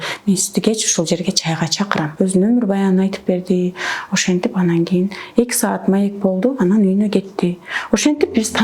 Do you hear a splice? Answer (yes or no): yes